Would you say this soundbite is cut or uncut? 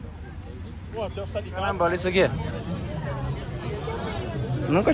cut